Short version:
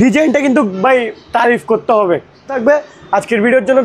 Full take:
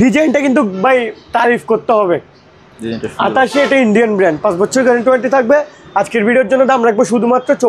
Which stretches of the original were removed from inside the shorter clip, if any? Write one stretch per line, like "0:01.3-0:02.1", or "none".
0:02.6-0:05.4